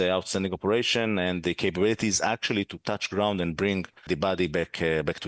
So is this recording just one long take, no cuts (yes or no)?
no